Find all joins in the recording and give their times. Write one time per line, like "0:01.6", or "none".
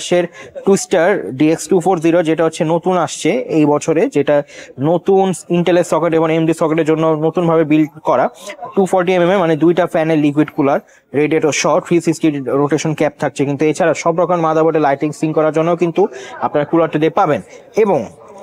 none